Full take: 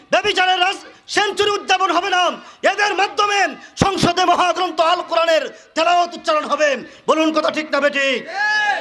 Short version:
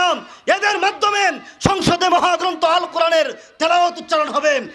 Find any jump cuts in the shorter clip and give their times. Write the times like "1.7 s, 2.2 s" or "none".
none